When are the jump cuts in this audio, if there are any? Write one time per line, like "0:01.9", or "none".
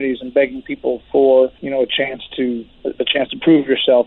0:01.6
0:02.7